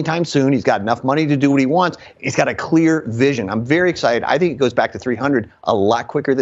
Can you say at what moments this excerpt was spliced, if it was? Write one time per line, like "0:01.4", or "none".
none